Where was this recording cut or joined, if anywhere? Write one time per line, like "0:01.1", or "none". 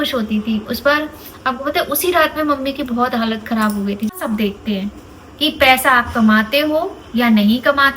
0:04.1